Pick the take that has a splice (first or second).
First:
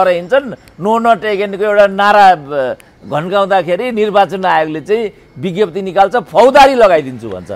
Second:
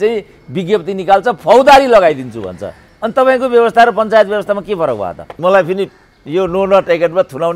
second